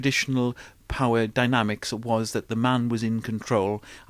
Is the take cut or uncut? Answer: cut